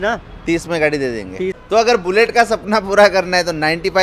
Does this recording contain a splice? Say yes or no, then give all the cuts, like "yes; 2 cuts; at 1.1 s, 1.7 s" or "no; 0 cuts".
yes; 1 cut; at 1.6 s